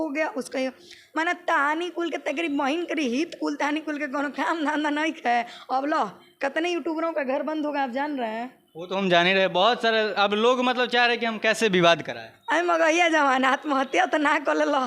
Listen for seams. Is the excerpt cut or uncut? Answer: uncut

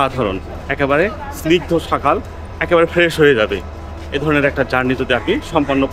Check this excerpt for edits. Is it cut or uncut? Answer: uncut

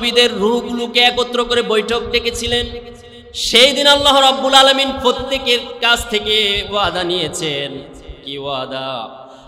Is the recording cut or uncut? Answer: uncut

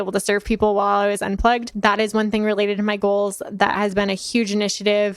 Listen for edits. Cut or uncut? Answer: cut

